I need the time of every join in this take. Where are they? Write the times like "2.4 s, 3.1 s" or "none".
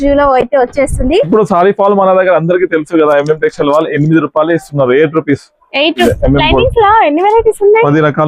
1.3 s, 6.0 s